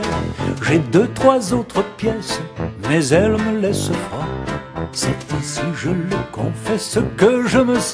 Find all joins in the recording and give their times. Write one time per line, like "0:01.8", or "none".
0:01.0